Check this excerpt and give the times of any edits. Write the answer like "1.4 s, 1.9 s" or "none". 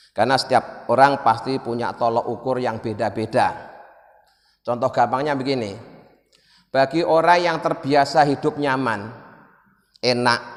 none